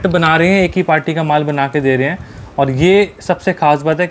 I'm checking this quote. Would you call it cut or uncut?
uncut